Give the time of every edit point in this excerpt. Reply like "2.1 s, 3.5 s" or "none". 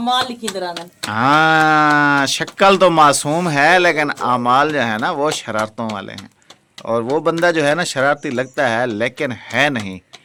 none

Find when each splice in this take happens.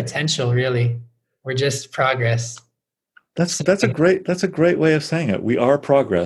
none

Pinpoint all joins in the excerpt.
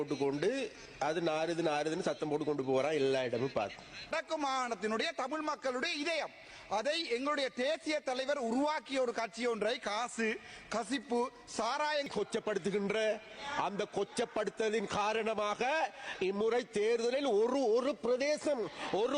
4.1 s, 12.1 s

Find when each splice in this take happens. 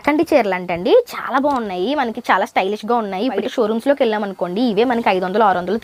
3.5 s

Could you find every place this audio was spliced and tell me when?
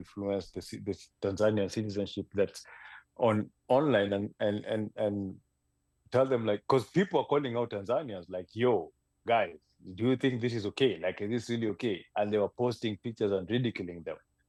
none

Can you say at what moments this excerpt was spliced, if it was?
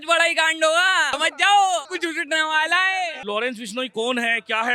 1.1 s, 1.9 s, 3.2 s

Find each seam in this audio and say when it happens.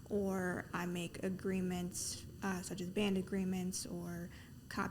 none

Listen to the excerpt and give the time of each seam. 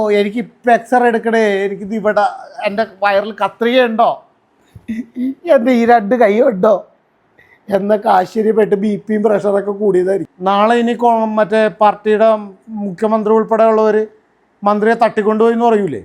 10.3 s

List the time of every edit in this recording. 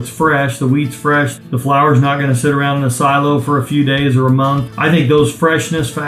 1.4 s, 4.6 s

